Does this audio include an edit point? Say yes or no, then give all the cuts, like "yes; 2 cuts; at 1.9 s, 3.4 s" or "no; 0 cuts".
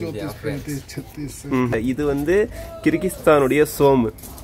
yes; 1 cut; at 1.7 s